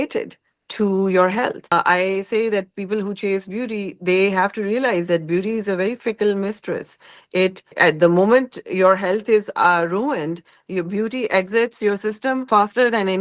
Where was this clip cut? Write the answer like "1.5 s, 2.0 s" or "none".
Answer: 1.7 s, 7.8 s, 12.4 s